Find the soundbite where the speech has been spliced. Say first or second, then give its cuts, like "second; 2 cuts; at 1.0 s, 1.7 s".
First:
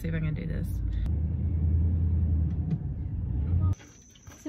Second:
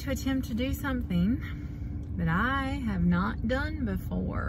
first; 2 cuts; at 1.0 s, 3.7 s